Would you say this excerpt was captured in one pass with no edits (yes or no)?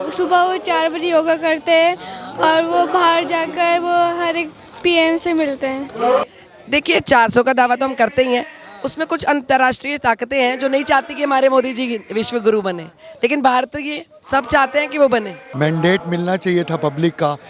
no